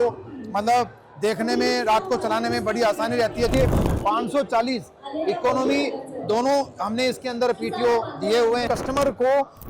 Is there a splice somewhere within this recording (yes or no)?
yes